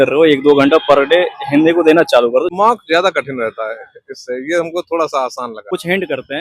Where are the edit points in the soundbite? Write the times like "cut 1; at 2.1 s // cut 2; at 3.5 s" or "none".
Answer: cut 1; at 2.5 s // cut 2; at 5.6 s